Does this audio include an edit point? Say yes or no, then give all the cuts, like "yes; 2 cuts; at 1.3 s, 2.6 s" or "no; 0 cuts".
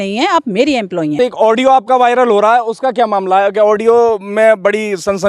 yes; 1 cut; at 1.1 s